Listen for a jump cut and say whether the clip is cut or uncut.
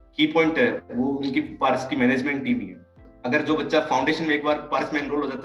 cut